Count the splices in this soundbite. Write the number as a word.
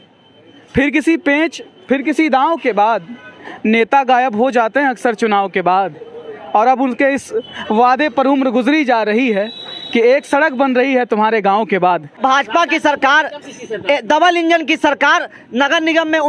one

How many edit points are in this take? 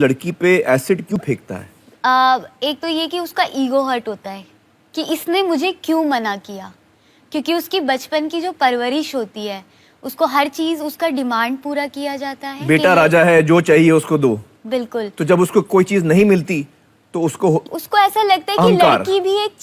one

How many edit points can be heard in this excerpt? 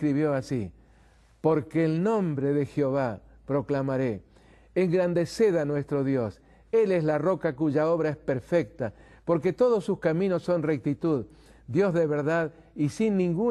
one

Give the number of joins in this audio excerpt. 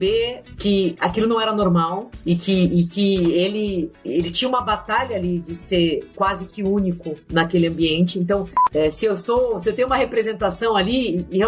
one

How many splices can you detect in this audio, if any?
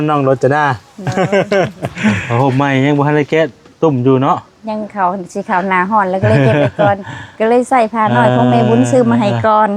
one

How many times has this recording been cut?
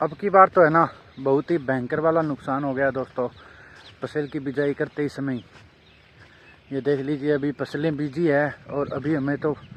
zero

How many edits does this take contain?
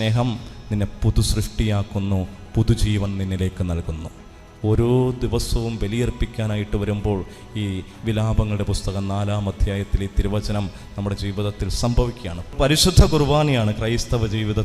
one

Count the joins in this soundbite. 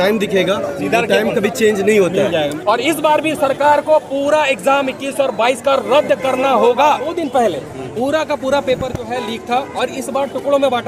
two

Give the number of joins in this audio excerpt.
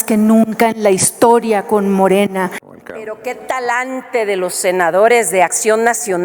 one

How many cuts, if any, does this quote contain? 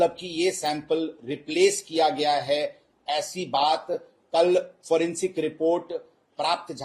zero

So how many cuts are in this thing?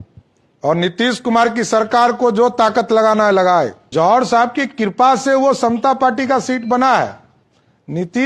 one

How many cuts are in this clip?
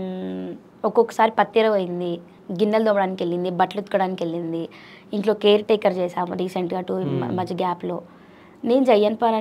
one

